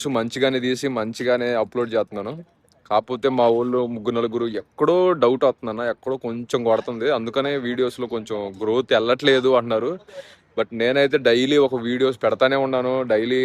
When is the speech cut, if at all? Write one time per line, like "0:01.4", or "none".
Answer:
none